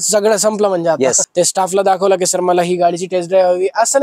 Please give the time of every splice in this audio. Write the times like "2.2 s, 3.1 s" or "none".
1.2 s